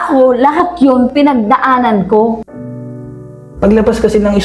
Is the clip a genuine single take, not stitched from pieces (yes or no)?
no